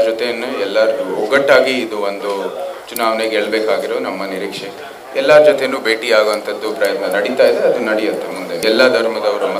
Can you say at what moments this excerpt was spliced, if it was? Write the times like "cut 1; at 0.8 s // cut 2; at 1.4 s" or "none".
cut 1; at 8.6 s